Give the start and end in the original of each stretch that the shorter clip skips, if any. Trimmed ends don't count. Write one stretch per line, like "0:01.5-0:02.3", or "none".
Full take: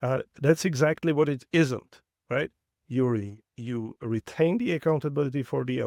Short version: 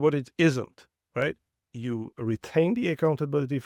0:02.7-0:03.4